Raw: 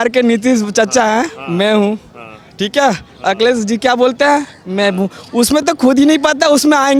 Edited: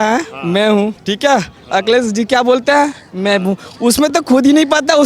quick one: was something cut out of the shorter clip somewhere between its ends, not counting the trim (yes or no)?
yes